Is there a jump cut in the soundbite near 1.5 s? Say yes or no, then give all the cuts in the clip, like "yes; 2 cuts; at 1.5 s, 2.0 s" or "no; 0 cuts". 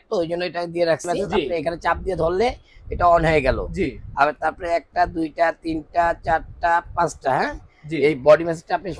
yes; 1 cut; at 1.5 s